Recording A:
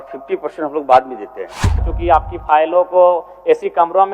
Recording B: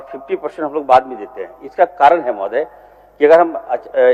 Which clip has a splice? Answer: A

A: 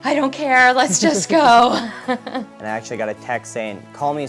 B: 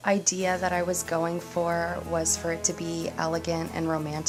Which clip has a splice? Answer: A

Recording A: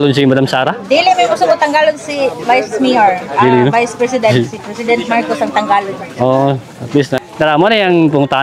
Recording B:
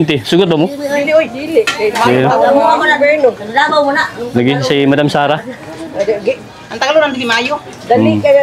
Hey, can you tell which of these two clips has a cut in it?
A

